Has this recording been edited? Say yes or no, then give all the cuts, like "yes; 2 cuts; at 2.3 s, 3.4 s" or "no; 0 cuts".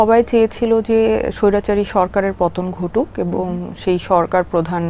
no; 0 cuts